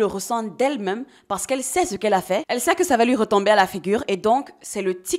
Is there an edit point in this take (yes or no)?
no